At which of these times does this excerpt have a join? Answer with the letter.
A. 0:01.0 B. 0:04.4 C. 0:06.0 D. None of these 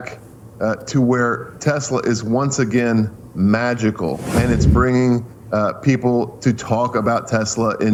D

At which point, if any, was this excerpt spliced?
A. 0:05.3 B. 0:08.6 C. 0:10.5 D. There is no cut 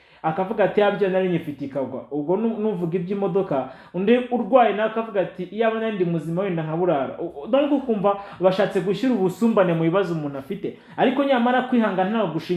D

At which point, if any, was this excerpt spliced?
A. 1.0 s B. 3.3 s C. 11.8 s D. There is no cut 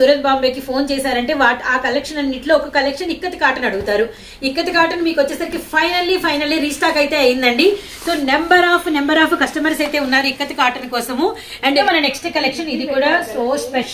C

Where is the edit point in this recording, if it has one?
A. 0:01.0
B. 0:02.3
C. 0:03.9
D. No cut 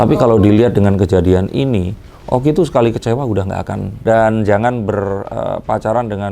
C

